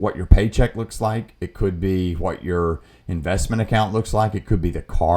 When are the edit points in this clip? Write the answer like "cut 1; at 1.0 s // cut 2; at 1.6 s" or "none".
none